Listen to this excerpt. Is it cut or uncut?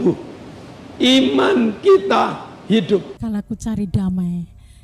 cut